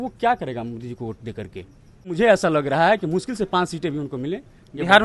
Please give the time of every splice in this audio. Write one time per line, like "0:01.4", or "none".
0:02.1